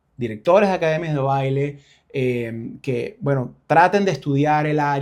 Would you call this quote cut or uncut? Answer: uncut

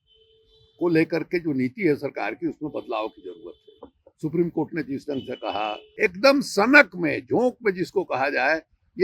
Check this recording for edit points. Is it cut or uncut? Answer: cut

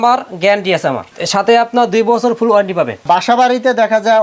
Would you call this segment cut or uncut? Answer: cut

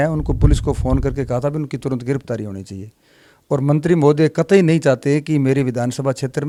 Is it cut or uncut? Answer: uncut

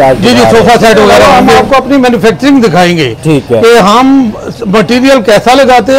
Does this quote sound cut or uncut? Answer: cut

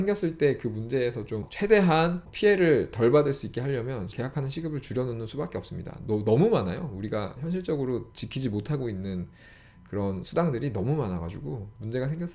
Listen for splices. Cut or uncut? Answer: cut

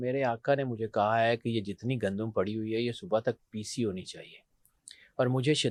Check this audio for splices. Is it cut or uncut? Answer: uncut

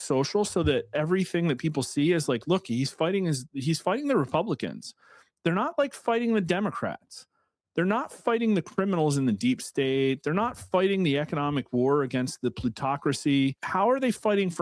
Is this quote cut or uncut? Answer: cut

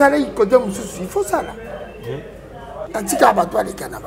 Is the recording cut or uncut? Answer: cut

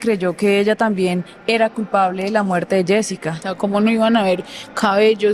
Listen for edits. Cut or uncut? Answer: cut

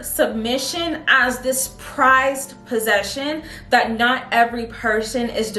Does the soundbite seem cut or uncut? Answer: uncut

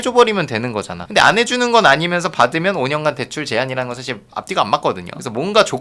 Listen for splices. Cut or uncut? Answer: uncut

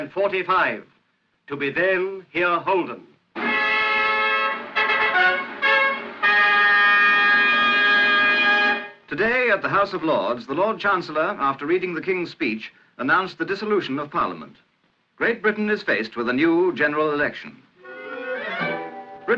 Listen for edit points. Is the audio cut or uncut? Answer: cut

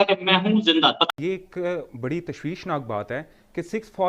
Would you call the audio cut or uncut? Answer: cut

